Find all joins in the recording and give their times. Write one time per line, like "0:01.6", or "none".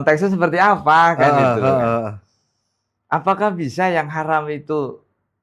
none